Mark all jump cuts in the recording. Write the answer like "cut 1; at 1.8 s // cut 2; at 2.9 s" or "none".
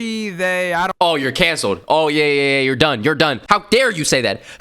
cut 1; at 3.4 s